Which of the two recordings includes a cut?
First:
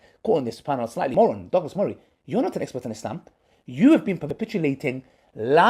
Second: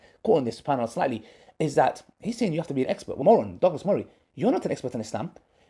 first; 2 cuts; at 1.1 s, 4.2 s

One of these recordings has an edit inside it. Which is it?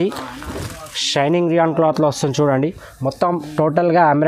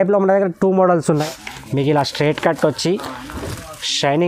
second; 1 cut; at 1.2 s

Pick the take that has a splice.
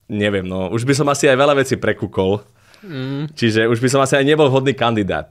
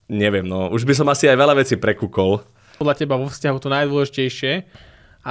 second; 1 cut; at 2.8 s

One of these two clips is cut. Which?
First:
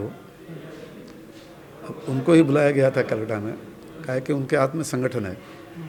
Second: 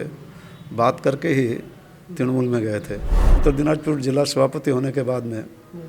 second; 1 cut; at 3.4 s

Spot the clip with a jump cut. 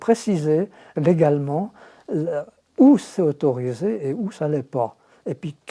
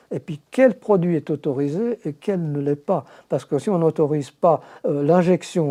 first; 1 cut; at 0.9 s

